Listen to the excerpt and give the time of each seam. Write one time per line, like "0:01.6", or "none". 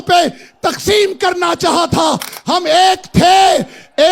none